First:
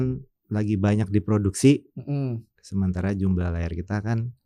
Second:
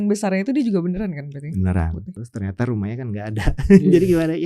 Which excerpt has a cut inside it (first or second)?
second